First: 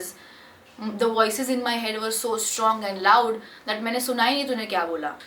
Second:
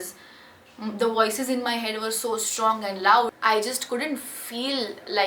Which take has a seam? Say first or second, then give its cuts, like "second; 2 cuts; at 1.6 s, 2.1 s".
second; 1 cut; at 3.3 s